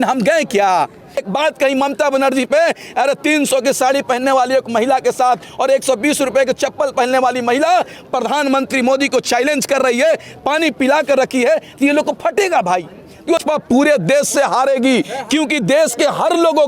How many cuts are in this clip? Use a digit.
2